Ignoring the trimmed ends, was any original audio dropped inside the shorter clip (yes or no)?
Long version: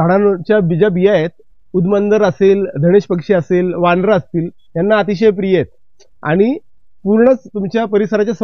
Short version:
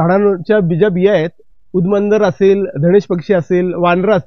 no